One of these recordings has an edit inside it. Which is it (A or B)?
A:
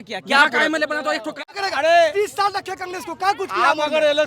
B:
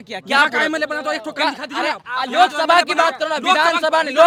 A